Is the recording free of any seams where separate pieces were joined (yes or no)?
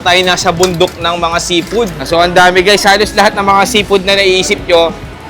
no